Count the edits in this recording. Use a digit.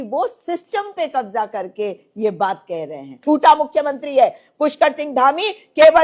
1